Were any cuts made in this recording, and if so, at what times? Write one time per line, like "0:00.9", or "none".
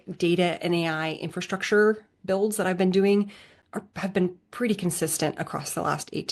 none